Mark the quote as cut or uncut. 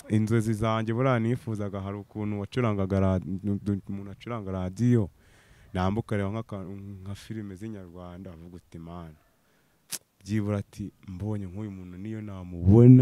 uncut